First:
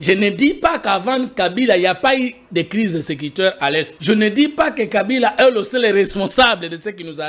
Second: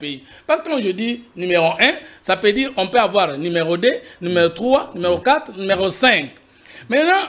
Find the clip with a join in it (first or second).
first